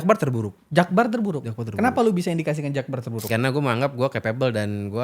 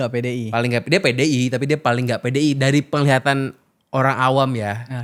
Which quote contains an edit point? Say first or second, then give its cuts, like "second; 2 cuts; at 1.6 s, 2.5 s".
first; 1 cut; at 3.3 s